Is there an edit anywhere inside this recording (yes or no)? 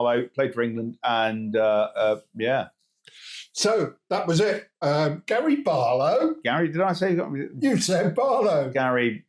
no